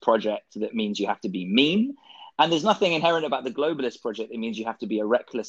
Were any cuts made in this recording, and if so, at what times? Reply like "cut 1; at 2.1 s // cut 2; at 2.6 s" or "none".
none